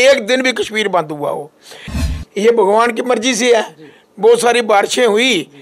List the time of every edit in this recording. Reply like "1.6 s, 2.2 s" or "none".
1.9 s